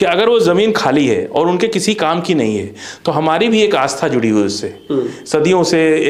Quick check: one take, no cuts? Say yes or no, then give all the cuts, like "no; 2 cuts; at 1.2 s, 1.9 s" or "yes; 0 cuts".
yes; 0 cuts